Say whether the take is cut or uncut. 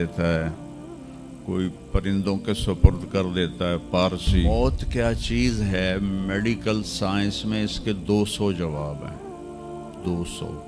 cut